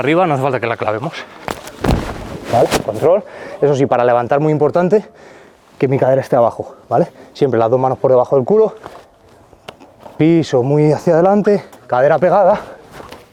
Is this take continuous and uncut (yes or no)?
yes